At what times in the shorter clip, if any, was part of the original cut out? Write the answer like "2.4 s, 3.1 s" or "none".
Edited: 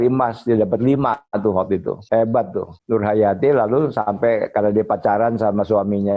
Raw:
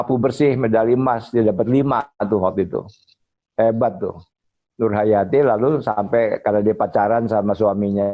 2.0 s, 2.7 s